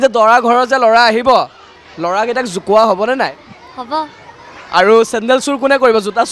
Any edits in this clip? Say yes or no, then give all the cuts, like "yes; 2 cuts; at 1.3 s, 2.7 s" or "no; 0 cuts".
no; 0 cuts